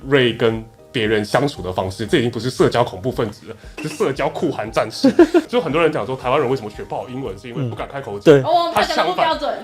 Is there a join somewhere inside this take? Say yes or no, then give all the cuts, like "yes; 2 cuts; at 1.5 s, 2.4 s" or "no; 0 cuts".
yes; 1 cut; at 5.5 s